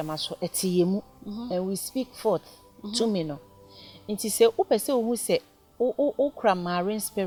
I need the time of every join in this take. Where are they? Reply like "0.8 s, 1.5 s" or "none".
none